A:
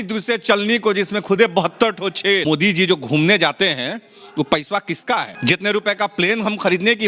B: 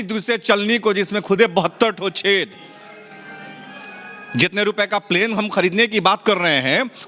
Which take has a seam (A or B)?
A